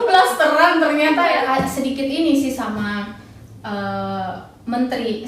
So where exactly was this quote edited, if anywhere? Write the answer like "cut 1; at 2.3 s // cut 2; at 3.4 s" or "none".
cut 1; at 1.4 s